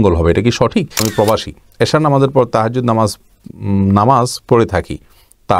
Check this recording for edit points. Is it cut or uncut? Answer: cut